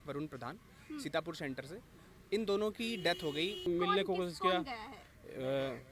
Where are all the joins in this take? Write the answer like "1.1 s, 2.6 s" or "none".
3.6 s